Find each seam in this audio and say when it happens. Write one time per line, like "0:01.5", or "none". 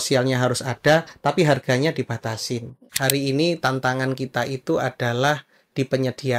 0:02.8